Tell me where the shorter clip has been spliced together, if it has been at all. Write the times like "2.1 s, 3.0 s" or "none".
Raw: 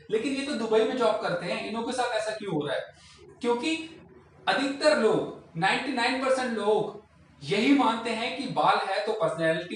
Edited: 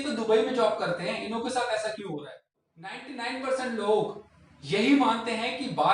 3.0 s